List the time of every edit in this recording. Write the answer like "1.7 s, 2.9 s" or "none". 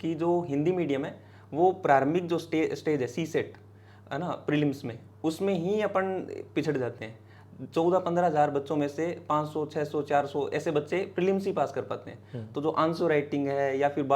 none